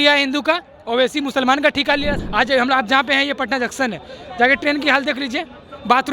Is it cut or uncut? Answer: cut